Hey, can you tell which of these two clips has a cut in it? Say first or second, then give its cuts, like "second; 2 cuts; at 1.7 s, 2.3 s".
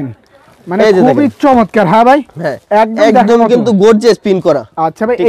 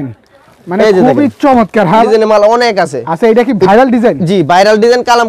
second; 1 cut; at 2.0 s